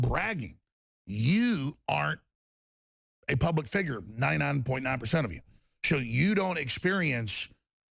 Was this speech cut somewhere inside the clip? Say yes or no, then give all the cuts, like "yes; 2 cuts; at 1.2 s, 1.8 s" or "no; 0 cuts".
no; 0 cuts